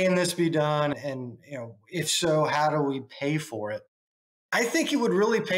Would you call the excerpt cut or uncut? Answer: cut